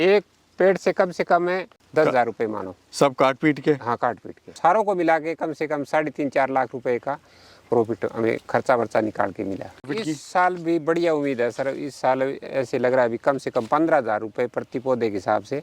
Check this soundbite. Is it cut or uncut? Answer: cut